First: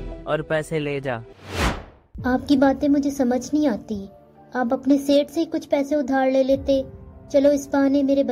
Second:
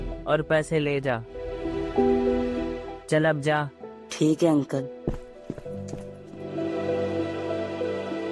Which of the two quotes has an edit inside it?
first; 1 cut; at 1.8 s

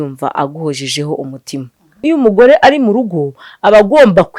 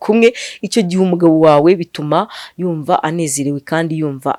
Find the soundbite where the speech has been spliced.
first; 1 cut; at 2.0 s

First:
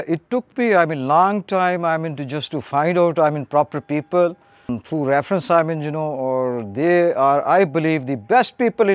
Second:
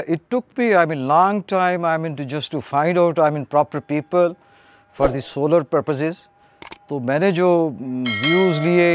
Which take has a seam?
first; 1 cut; at 4.7 s

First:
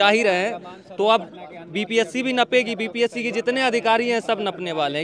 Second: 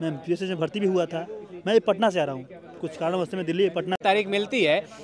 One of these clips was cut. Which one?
second; 1 cut; at 4.0 s

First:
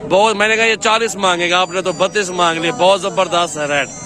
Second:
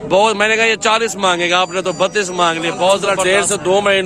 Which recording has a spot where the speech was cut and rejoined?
second; 1 cut; at 3.1 s

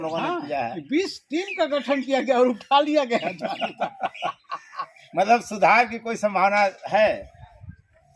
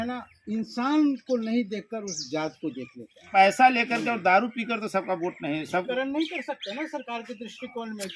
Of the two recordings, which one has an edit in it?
second; 2 cuts; at 3.2 s, 5.9 s

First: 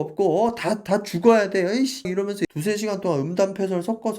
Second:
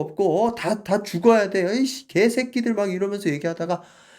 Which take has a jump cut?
first; 1 cut; at 2.1 s

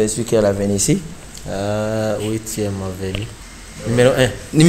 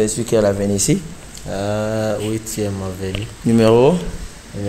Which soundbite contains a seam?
first; 1 cut; at 3.3 s

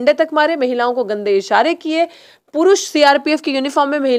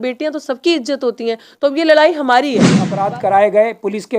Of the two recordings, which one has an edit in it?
second; 1 cut; at 2.9 s

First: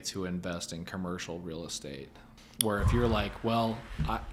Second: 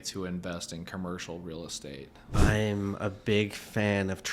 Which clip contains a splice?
second; 1 cut; at 2.3 s

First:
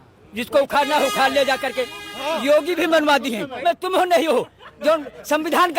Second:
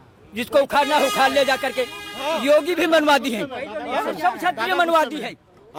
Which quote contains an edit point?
first; 1 cut; at 3.6 s

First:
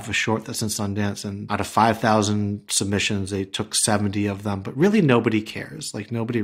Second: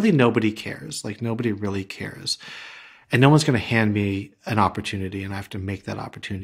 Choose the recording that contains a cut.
first; 1 cut; at 1.4 s

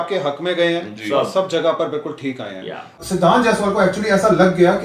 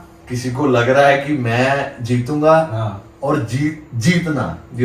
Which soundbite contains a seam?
first; 1 cut; at 3.0 s

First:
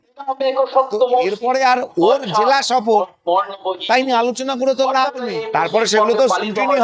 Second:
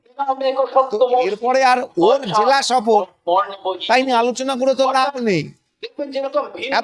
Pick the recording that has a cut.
first; 1 cut; at 5.3 s

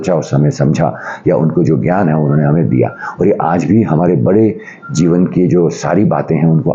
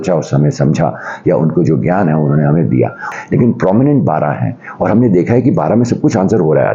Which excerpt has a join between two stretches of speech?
second; 1 cut; at 3.1 s

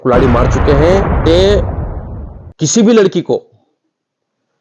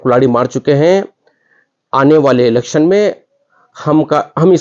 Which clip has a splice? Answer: first; 1 cut; at 1.2 s

